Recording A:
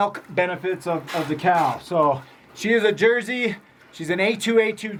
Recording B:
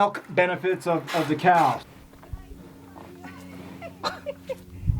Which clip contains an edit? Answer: B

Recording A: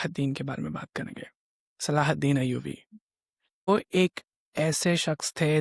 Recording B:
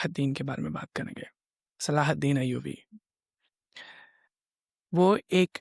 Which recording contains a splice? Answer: A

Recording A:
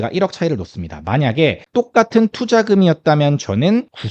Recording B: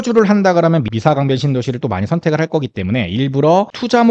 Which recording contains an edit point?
A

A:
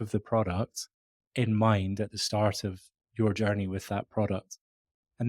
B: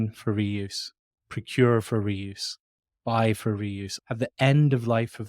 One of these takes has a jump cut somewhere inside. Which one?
B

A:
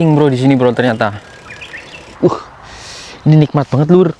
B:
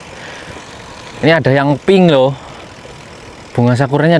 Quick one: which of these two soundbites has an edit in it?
A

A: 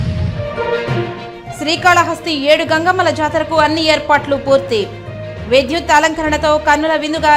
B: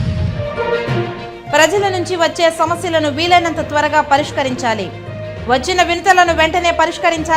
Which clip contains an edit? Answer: B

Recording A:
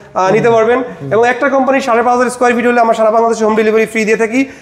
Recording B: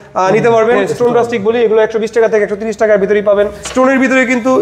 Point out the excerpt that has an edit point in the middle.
B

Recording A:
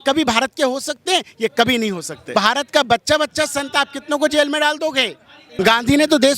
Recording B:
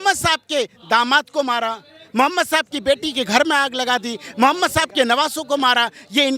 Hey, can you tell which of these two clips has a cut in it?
A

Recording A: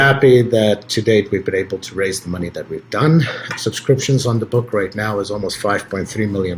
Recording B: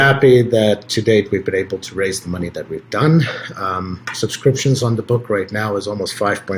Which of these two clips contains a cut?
A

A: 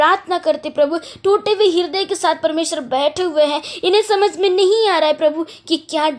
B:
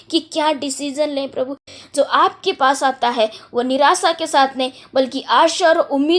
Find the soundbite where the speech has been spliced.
B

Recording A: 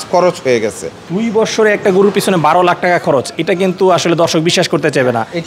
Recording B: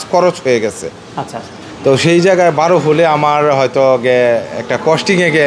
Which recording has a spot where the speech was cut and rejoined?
A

